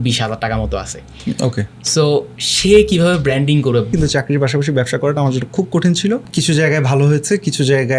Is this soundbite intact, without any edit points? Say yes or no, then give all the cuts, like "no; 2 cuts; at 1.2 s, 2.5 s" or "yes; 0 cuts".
no; 2 cuts; at 3.9 s, 6.3 s